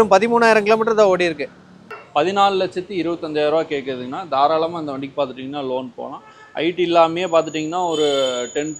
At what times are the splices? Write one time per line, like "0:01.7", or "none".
0:01.6